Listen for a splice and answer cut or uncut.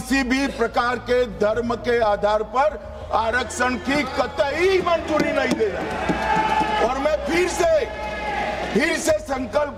uncut